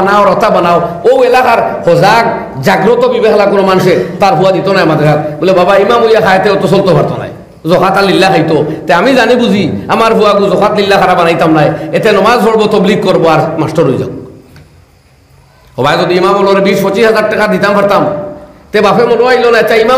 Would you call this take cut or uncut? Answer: uncut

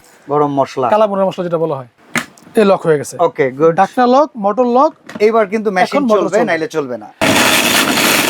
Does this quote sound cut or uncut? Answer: cut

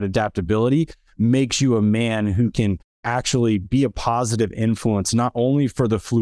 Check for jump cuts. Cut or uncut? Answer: cut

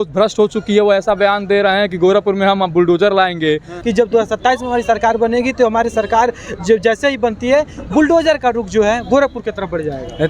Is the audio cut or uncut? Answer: cut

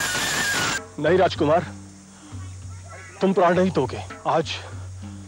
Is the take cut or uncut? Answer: cut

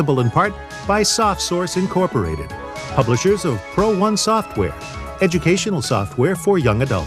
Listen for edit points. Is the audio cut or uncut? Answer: uncut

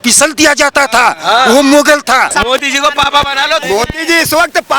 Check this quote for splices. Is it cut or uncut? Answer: cut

